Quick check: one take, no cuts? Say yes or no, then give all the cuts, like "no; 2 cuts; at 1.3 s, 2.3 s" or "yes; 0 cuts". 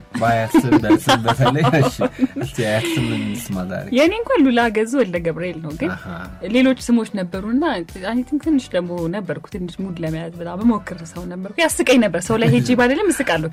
yes; 0 cuts